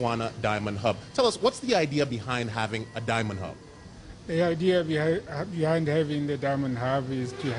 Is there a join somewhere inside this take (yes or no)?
no